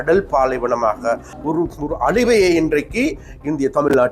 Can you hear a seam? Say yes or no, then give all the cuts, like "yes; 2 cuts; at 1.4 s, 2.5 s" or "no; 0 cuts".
yes; 1 cut; at 1.3 s